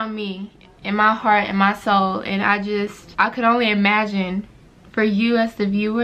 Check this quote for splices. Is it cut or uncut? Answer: uncut